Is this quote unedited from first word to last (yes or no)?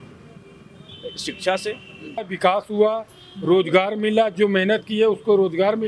no